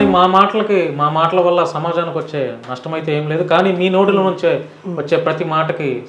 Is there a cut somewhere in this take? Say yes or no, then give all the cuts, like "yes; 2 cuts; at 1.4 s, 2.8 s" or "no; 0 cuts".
no; 0 cuts